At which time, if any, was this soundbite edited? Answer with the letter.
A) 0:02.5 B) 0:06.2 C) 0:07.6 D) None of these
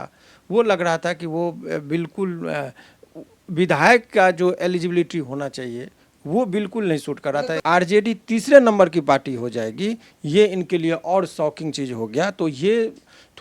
C